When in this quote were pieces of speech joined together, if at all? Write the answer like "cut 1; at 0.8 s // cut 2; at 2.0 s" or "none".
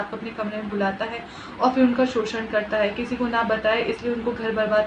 none